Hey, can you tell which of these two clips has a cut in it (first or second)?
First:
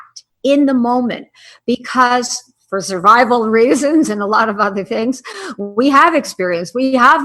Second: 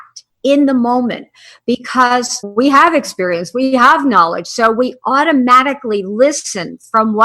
second